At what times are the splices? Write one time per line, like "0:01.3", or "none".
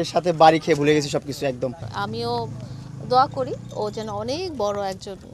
0:01.9